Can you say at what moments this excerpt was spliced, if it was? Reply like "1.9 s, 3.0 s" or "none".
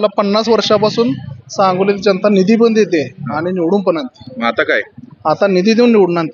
none